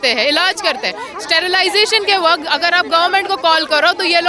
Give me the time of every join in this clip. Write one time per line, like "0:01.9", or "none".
none